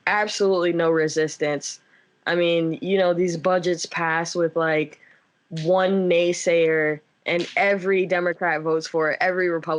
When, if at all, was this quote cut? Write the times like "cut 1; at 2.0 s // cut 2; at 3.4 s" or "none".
none